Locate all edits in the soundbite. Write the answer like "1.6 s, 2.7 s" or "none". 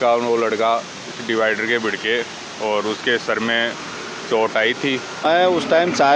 5.2 s